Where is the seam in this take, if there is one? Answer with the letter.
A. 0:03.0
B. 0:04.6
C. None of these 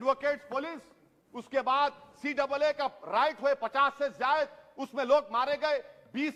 C